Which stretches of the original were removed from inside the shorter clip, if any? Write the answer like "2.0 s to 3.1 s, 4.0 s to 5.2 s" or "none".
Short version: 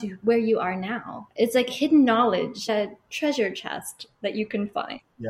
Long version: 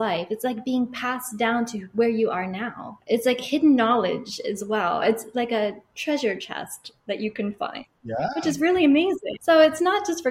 4.4 s to 5.5 s